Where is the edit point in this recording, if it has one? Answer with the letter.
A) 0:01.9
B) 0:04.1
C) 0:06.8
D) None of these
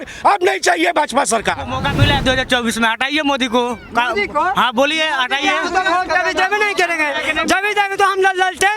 A